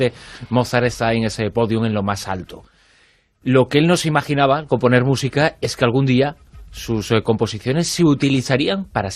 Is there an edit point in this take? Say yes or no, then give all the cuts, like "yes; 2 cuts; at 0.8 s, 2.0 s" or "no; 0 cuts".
no; 0 cuts